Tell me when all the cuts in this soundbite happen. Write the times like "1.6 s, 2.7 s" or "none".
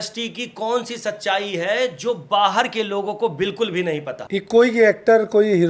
4.2 s